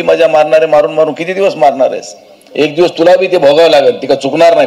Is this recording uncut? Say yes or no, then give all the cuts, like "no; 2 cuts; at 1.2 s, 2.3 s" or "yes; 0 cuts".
yes; 0 cuts